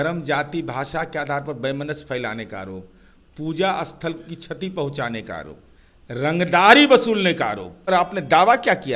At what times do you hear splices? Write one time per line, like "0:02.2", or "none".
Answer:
0:07.9